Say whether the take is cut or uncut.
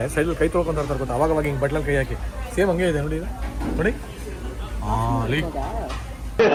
uncut